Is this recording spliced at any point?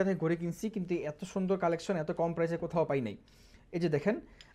no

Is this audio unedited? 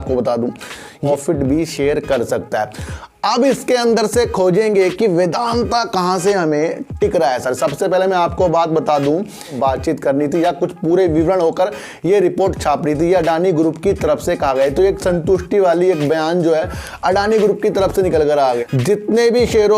no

